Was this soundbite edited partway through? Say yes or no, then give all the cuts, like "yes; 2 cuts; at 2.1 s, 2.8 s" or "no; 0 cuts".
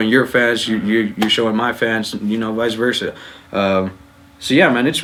no; 0 cuts